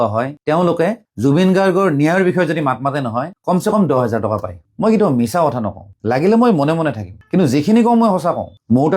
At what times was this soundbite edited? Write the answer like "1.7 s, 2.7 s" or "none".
none